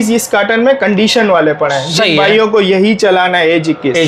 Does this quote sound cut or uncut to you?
uncut